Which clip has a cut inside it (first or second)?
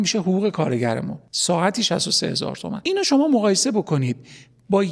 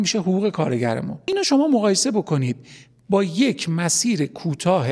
second